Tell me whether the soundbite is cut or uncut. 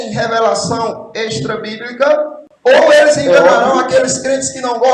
cut